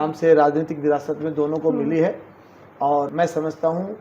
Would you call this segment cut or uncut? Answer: cut